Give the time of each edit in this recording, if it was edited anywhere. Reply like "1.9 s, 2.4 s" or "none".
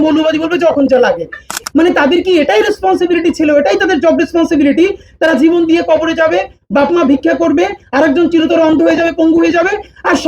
1.6 s

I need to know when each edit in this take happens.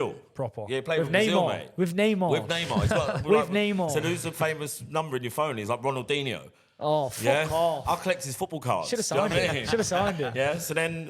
none

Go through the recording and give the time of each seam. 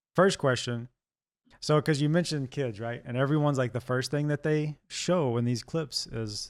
none

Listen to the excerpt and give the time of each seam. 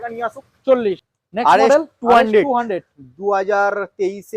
1.2 s

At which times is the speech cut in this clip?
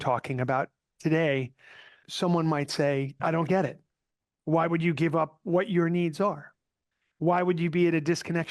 2.0 s, 3.1 s

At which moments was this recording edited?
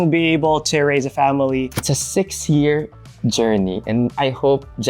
1.8 s, 4.1 s

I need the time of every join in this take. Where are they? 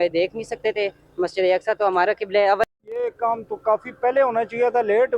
2.7 s

